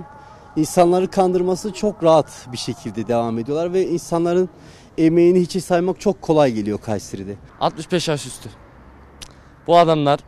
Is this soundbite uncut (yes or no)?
no